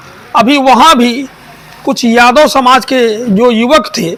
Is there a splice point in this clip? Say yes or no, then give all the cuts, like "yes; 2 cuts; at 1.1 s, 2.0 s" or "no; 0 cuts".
no; 0 cuts